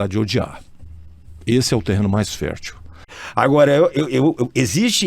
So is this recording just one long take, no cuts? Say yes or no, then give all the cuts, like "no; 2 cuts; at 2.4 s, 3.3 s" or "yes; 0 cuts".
no; 1 cut; at 3.1 s